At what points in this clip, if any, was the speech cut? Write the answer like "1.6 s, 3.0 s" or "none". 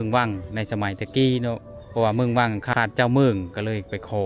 2.7 s